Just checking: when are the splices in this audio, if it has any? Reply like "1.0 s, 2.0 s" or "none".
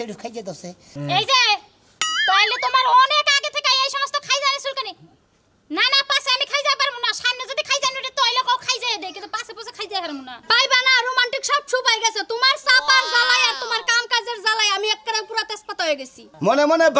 10.3 s